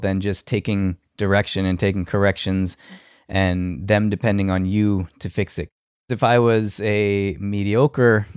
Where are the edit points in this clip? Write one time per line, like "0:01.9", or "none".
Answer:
0:06.1